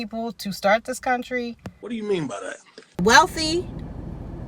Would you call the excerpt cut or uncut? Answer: cut